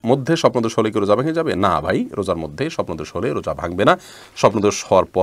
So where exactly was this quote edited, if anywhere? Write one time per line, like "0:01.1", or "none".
none